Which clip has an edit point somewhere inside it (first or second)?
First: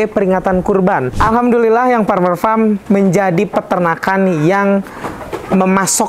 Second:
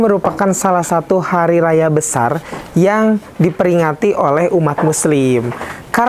first